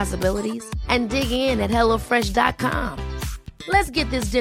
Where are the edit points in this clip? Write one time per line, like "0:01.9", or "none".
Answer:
none